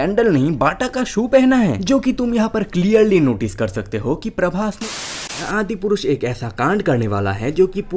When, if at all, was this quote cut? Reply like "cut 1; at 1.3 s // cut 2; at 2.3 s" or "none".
cut 1; at 4.9 s